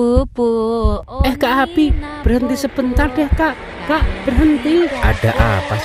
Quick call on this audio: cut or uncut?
uncut